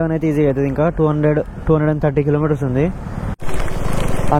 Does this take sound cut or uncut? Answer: cut